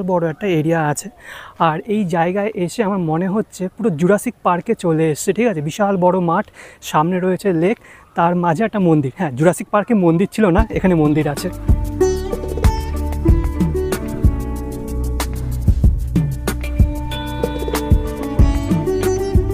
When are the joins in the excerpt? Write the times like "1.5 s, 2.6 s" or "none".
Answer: none